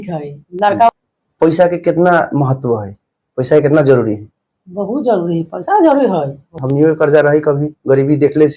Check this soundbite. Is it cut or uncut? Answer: cut